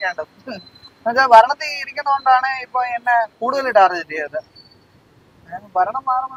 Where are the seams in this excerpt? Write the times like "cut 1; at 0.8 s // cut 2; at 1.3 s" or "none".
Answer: none